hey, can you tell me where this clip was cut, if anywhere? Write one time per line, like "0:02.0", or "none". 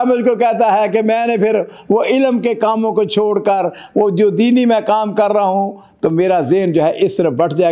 none

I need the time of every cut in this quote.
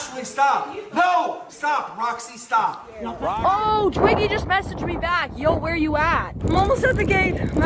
0:03.2

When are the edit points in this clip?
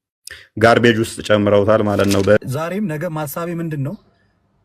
0:02.4

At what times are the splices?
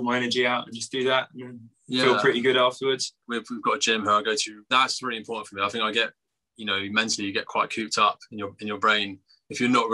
0:03.2
0:04.7

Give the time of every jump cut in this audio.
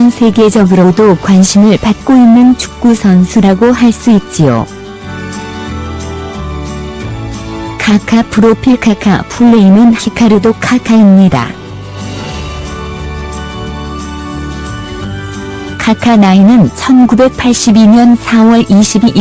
none

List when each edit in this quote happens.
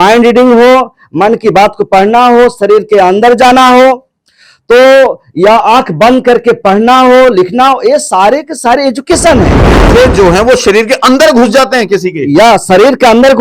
0:09.8

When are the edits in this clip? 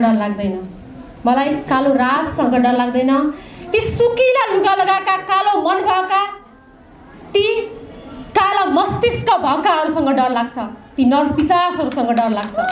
none

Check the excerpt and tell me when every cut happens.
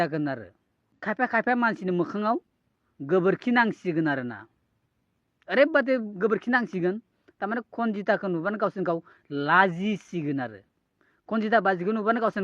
0:01.0

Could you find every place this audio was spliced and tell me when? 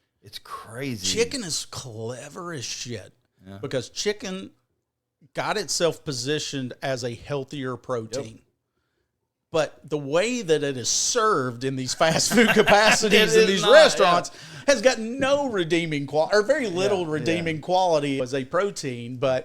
0:18.2

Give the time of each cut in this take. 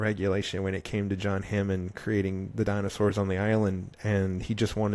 none

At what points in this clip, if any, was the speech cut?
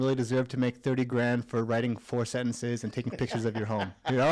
none

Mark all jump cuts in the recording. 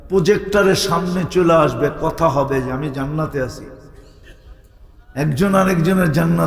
none

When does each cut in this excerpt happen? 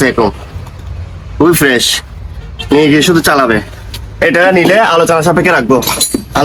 none

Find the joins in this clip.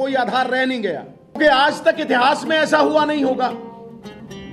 0:01.4
0:03.5

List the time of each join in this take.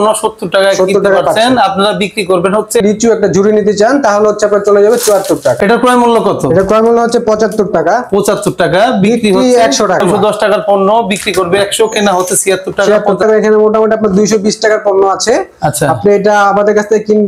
0:02.8
0:05.6
0:10.0
0:13.2

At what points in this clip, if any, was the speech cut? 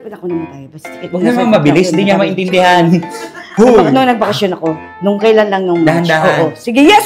none

